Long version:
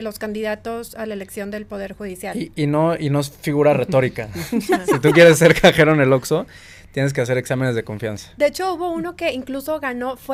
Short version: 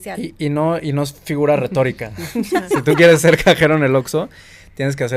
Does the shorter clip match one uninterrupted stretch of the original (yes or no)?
yes